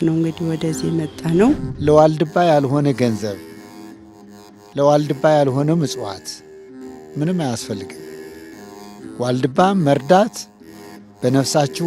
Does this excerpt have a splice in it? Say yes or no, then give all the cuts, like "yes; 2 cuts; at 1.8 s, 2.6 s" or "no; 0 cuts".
yes; 1 cut; at 1.7 s